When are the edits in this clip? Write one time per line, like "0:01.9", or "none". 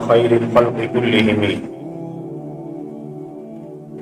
none